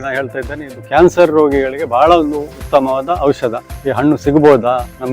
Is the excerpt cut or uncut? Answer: cut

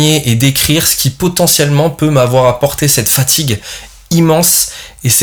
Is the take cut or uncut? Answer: uncut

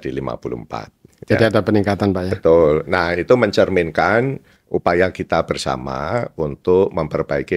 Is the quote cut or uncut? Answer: uncut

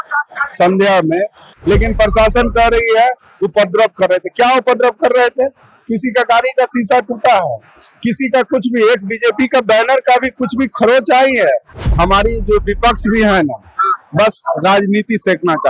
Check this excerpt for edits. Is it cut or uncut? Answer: cut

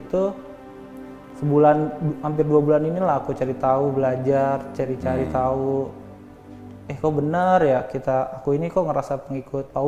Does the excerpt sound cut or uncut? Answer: uncut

